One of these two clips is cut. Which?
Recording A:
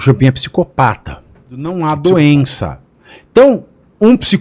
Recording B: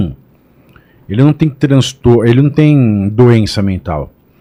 A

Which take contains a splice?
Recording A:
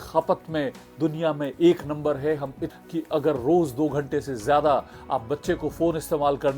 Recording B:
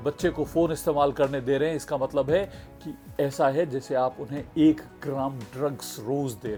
A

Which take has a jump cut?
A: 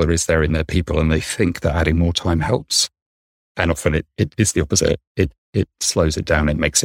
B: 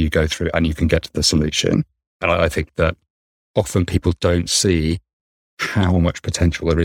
B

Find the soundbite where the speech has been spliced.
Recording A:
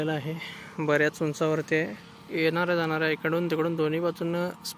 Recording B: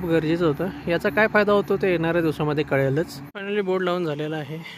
B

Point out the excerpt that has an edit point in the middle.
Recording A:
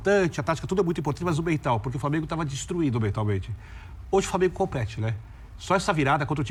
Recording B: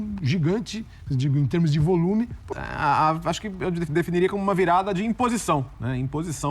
B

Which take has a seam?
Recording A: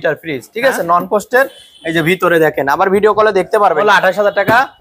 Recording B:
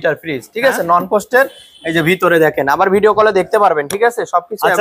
A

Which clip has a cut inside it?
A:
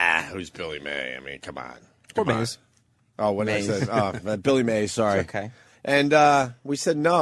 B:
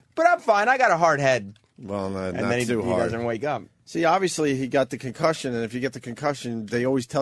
A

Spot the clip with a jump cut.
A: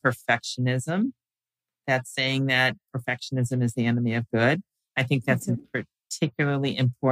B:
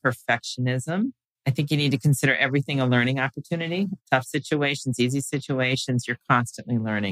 B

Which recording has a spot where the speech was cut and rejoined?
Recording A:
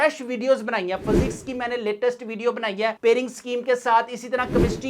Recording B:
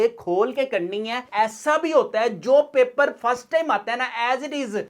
B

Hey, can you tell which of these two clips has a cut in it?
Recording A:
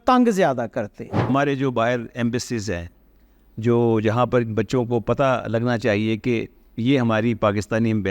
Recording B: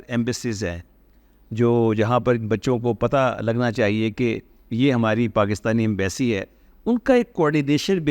A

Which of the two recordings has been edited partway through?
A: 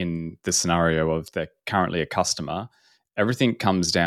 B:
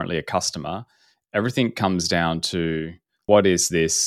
B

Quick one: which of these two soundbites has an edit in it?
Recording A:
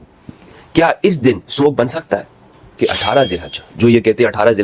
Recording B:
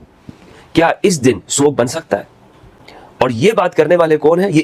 A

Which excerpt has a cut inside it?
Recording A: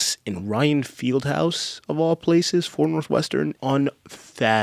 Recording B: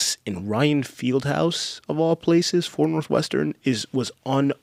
A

